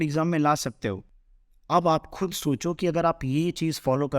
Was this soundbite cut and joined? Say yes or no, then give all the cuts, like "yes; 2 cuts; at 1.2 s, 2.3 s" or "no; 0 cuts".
yes; 1 cut; at 1.0 s